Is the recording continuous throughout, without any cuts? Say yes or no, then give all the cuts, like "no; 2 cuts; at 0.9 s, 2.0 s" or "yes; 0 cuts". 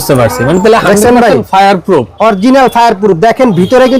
yes; 0 cuts